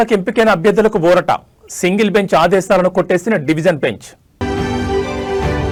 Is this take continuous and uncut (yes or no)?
yes